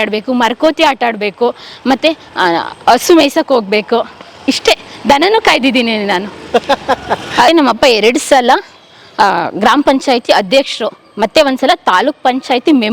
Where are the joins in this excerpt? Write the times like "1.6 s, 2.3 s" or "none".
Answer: 7.5 s